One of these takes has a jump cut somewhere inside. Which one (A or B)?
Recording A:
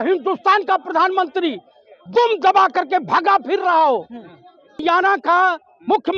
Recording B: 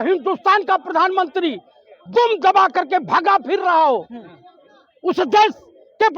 A